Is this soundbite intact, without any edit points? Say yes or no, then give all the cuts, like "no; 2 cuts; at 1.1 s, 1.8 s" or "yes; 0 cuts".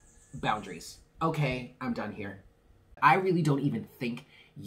no; 1 cut; at 3.0 s